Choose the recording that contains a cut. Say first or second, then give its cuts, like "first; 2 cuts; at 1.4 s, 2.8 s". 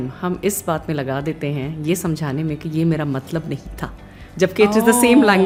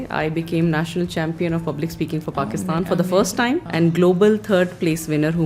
second; 1 cut; at 3.7 s